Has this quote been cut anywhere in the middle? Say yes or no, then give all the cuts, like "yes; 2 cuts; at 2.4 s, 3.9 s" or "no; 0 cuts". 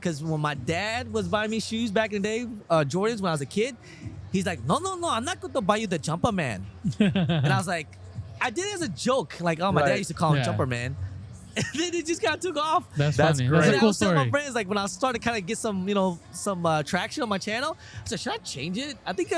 no; 0 cuts